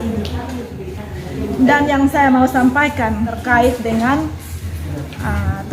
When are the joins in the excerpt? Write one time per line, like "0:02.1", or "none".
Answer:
0:03.4